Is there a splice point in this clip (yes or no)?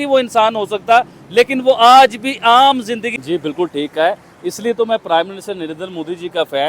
yes